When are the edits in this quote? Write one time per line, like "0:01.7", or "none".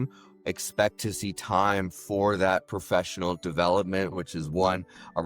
0:04.1